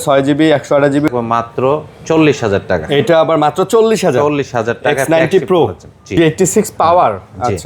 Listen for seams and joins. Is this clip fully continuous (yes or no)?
no